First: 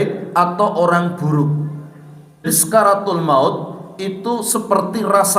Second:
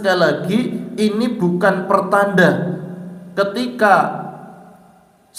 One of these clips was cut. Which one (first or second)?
first